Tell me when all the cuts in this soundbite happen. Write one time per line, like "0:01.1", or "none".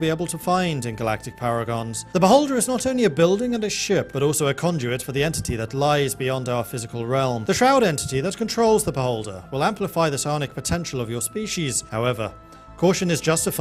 none